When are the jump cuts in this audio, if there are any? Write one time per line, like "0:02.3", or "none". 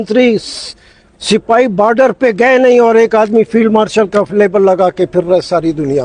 none